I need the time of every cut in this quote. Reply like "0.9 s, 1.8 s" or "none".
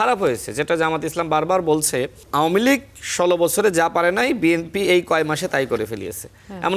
2.2 s